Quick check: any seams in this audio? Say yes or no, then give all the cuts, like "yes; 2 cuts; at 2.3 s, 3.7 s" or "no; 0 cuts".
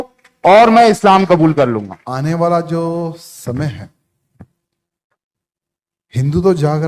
yes; 1 cut; at 2.0 s